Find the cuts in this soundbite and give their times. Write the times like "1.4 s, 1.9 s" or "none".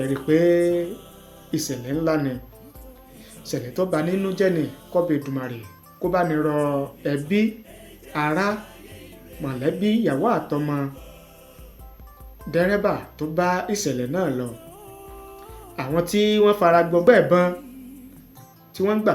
17.0 s